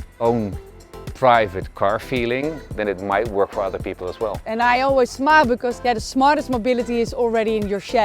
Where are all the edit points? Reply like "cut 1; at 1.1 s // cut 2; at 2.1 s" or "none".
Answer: cut 1; at 4.4 s // cut 2; at 5.7 s